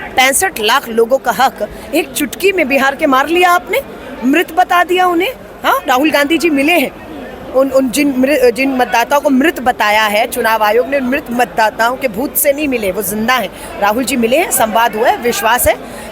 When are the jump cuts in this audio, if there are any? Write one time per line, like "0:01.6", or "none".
none